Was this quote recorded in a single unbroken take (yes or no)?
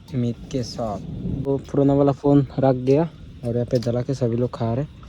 no